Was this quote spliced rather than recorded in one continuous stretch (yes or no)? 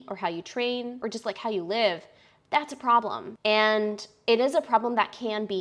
yes